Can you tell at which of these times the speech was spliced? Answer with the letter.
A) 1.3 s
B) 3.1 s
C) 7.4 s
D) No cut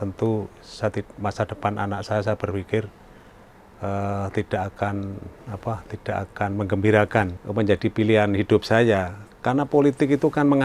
C